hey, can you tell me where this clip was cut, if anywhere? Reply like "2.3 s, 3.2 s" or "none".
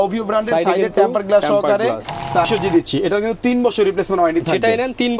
2.5 s